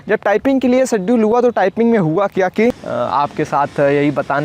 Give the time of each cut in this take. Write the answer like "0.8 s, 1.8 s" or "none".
2.8 s